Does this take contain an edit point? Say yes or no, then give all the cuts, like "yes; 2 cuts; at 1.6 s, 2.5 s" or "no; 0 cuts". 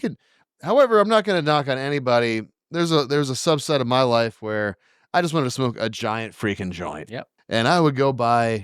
yes; 1 cut; at 7.3 s